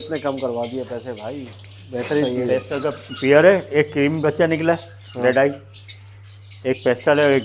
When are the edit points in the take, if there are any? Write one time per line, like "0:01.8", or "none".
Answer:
0:02.2